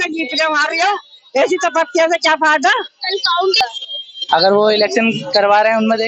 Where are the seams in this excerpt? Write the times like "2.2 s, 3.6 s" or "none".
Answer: 3.6 s